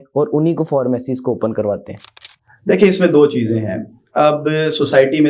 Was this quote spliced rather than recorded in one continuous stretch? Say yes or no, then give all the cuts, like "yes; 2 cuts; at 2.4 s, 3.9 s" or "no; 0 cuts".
no; 0 cuts